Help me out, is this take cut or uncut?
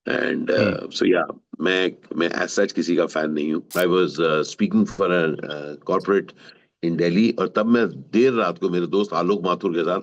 cut